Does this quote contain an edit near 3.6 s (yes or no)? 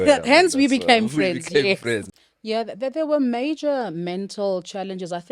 no